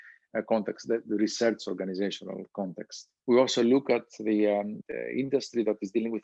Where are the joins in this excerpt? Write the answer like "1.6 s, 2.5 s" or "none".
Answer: 3.1 s, 4.8 s